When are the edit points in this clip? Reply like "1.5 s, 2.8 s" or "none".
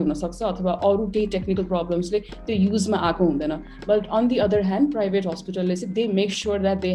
none